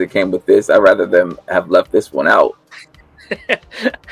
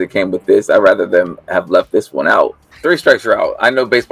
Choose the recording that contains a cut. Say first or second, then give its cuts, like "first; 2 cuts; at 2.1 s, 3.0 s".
second; 1 cut; at 2.7 s